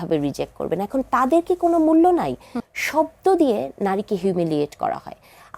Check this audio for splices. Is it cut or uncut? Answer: cut